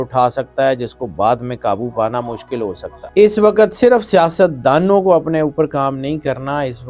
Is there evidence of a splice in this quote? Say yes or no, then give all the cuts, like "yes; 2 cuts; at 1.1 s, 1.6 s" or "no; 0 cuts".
no; 0 cuts